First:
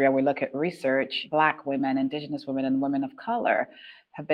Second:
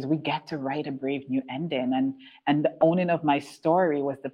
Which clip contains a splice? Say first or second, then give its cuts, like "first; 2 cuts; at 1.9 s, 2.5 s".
first; 1 cut; at 1.2 s